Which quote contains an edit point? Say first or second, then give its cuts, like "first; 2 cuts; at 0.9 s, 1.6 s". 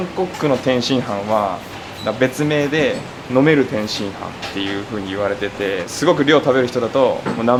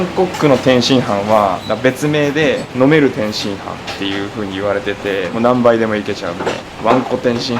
second; 4 cuts; at 1.6 s, 2.7 s, 5.3 s, 6.7 s